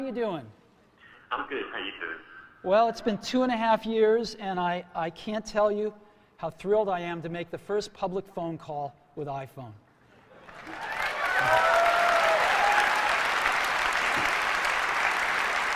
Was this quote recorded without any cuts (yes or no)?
yes